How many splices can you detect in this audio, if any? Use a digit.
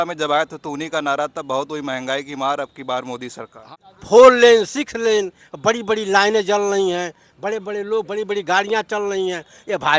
1